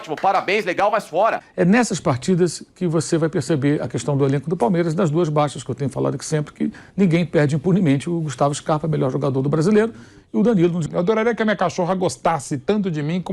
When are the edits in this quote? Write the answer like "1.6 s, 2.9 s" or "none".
1.4 s, 10.8 s